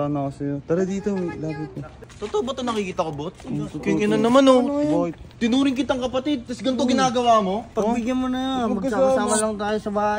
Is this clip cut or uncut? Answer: cut